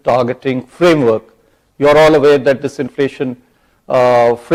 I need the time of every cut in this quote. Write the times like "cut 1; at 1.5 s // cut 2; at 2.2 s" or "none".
none